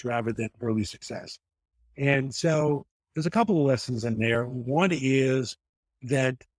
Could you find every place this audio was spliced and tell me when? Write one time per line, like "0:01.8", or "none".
none